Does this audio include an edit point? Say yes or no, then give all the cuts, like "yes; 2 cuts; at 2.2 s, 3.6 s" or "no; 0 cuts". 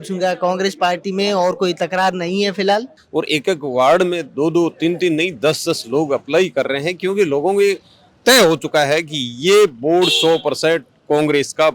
yes; 1 cut; at 3.0 s